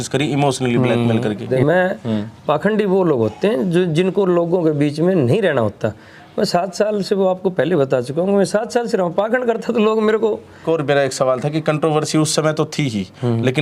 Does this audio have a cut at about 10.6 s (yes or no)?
yes